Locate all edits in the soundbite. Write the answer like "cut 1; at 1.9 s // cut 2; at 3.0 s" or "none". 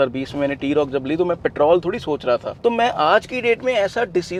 none